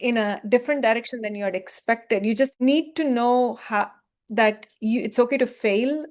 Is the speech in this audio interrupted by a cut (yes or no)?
yes